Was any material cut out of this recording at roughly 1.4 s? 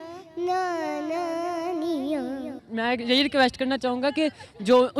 no; 1 cut; at 2.6 s

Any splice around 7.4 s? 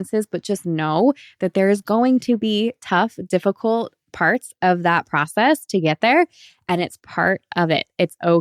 no; 0 cuts

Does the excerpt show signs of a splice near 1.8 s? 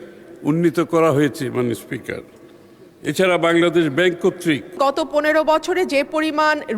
no; 1 cut; at 4.8 s

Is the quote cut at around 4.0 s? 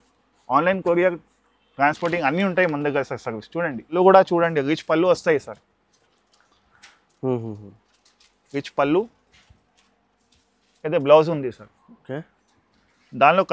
yes; 1 cut; at 4.0 s

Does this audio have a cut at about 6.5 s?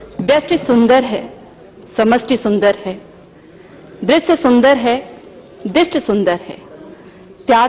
yes; 1 cut; at 6.5 s

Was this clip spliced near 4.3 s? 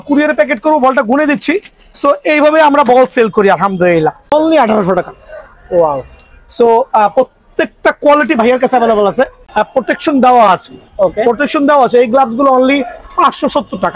yes; 2 cuts; at 4.3 s, 9.4 s

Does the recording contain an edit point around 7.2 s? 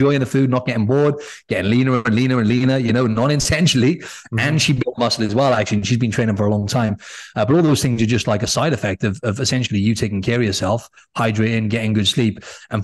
no; 0 cuts

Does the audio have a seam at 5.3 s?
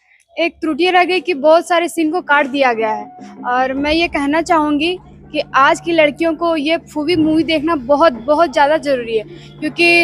no; 0 cuts

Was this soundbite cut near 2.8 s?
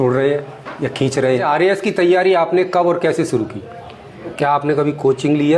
no; 2 cuts; at 1.4 s, 4.3 s

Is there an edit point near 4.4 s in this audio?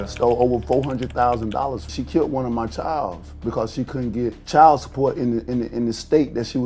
yes; 2 cuts; at 1.9 s, 4.4 s

